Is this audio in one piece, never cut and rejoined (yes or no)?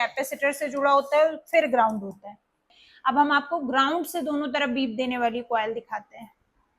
no